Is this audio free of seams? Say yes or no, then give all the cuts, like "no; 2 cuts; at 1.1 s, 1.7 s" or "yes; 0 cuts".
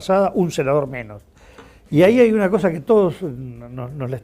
no; 1 cut; at 1.2 s